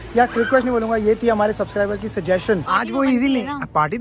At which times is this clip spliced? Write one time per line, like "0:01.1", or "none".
0:02.8